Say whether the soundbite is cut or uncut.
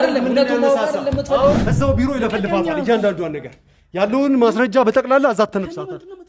cut